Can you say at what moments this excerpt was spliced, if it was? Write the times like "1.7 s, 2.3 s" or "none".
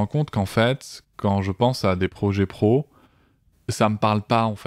none